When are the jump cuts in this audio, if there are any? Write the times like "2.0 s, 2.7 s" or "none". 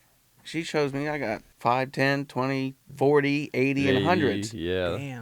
1.5 s, 2.8 s